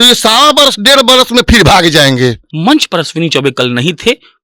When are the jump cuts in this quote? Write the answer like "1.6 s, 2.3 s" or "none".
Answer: 2.5 s